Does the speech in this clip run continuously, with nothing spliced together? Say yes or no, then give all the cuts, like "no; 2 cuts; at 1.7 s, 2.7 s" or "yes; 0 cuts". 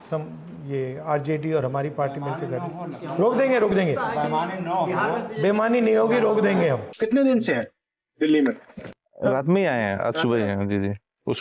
no; 1 cut; at 6.9 s